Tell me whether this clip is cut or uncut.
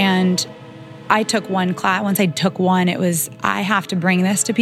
cut